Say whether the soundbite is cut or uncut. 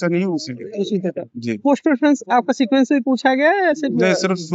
uncut